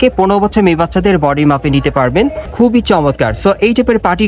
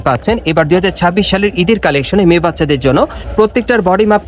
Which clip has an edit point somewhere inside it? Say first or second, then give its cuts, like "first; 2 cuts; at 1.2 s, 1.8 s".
first; 1 cut; at 2.4 s